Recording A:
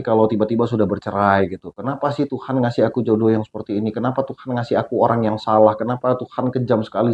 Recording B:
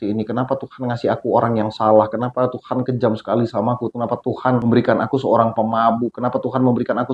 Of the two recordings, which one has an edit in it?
B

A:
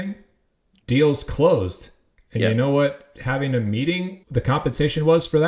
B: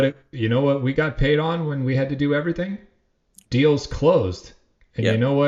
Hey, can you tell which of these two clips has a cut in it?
A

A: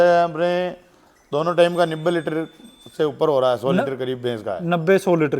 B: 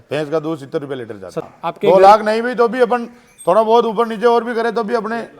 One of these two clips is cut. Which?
B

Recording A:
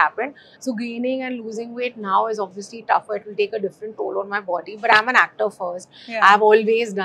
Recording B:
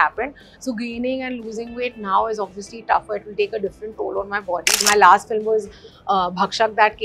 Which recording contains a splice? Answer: B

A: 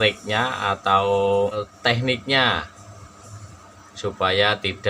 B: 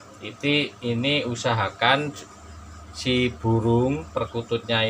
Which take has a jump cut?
A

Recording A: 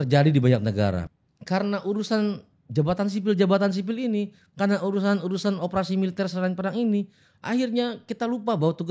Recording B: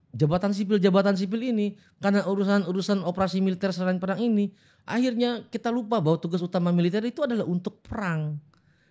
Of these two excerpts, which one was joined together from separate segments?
A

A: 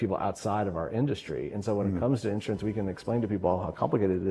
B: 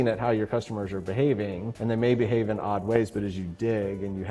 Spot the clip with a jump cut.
B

